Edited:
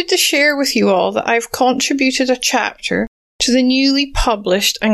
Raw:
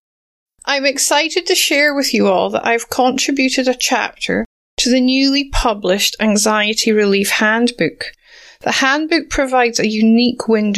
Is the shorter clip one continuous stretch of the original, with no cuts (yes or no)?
yes